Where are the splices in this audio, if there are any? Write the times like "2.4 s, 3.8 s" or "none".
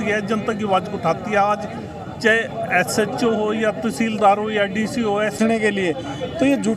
5.4 s